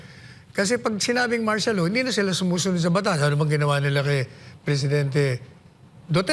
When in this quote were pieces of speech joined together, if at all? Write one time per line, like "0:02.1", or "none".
none